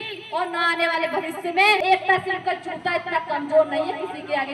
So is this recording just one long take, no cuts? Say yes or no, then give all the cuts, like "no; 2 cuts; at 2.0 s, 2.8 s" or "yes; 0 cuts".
no; 1 cut; at 1.8 s